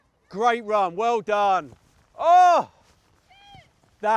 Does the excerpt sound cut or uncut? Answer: uncut